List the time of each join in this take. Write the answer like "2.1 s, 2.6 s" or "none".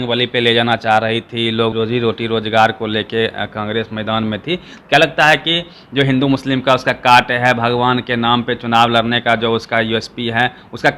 1.7 s

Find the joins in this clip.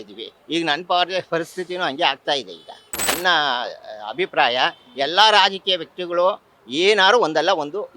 3.1 s

